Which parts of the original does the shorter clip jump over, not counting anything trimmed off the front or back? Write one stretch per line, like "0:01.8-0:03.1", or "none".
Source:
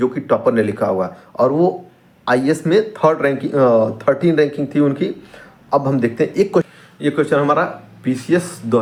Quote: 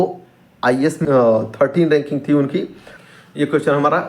0:02.6-0:03.5
0:05.6-0:06.8